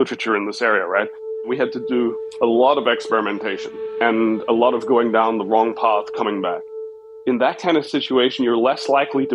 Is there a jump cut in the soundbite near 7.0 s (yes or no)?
yes